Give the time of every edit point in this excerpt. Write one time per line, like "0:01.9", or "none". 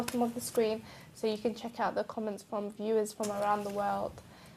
0:01.6